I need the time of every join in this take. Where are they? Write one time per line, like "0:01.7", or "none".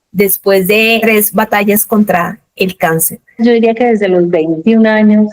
0:01.0
0:03.4